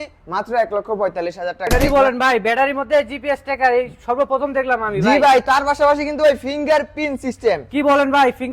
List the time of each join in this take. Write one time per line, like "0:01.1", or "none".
0:01.7